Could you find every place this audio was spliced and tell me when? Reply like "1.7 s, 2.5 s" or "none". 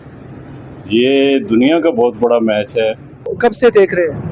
3.3 s